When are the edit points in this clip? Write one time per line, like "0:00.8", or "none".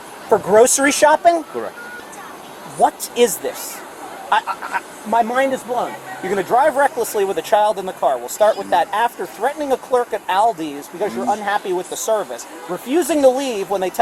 0:01.8

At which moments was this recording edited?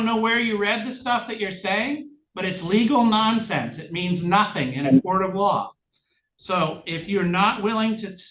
none

